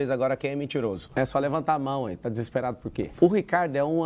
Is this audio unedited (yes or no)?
no